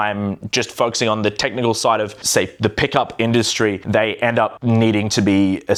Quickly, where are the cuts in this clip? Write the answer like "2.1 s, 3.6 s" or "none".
none